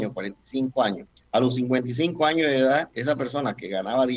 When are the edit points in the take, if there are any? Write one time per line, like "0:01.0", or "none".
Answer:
0:01.1